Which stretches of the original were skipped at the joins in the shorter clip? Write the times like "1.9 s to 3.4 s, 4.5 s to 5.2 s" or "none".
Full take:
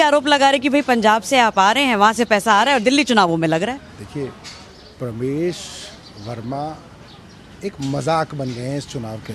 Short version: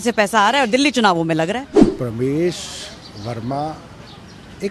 3.9 s to 4.8 s

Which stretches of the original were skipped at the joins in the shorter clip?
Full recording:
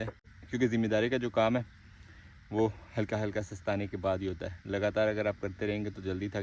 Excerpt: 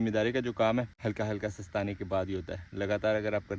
1.7 s to 2.9 s

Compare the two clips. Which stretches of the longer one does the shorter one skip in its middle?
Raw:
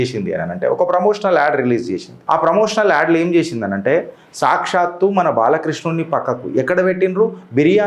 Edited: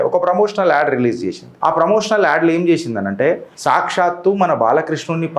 4.2 s to 4.3 s

